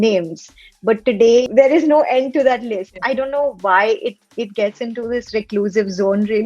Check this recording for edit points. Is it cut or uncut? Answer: cut